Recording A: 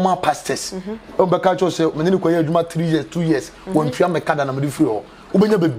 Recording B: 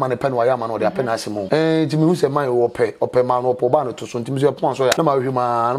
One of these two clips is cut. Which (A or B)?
B